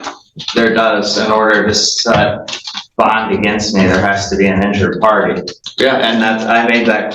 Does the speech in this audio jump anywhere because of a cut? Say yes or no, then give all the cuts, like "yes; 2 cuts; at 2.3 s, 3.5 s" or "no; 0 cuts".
yes; 1 cut; at 5.6 s